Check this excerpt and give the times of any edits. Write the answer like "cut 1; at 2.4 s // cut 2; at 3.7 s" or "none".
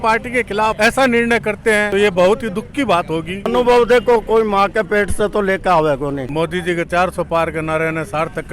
cut 1; at 0.8 s // cut 2; at 1.9 s // cut 3; at 3.5 s // cut 4; at 6.2 s